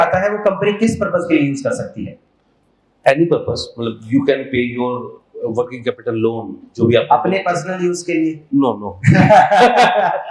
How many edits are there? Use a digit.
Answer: 0